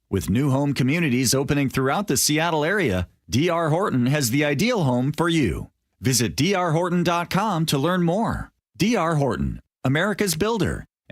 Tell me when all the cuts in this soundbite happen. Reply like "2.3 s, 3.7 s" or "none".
none